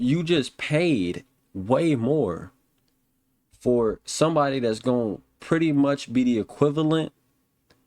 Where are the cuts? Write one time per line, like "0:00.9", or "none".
none